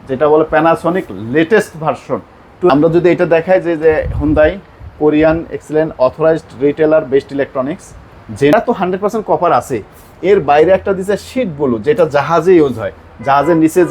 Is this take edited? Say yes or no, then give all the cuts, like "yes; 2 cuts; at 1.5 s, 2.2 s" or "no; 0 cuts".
yes; 2 cuts; at 2.7 s, 8.5 s